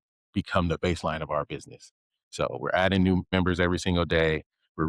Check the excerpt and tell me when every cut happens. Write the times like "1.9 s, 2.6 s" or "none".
3.3 s